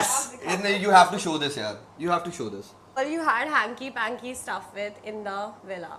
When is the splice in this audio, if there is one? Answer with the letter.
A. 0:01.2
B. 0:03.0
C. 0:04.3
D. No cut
B